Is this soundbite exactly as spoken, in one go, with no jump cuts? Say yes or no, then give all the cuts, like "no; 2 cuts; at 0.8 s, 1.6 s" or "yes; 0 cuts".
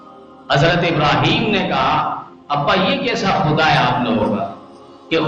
yes; 0 cuts